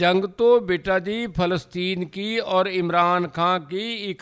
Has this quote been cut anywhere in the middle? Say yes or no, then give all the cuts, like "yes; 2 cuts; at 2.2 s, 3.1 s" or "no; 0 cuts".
no; 0 cuts